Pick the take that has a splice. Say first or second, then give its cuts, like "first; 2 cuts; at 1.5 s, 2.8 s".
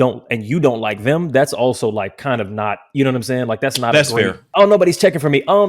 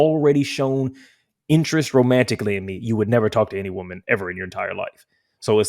first; 1 cut; at 4.4 s